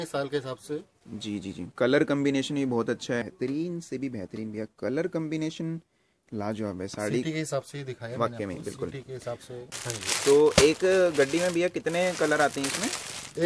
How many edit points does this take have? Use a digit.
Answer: 2